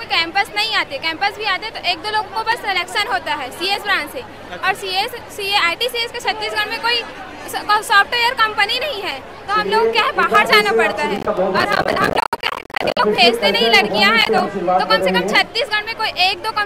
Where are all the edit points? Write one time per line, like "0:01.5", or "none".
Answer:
none